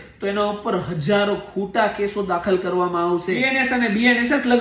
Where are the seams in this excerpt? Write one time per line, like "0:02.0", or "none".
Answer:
0:03.5